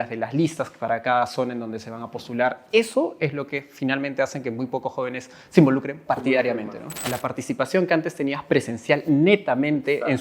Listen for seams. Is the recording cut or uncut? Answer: cut